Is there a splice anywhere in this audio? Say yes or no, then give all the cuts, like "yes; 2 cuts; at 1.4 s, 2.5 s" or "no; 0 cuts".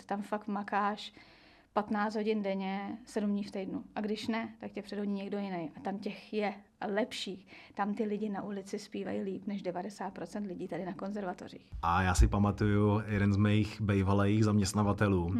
yes; 1 cut; at 11.7 s